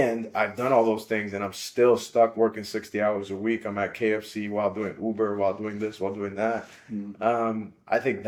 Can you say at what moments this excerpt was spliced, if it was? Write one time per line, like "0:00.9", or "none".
none